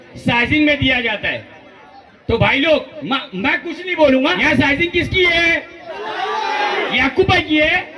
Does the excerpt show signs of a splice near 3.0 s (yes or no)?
no